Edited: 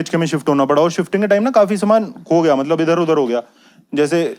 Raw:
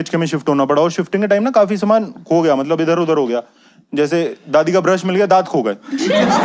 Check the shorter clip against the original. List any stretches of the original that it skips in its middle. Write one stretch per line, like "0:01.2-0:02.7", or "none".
none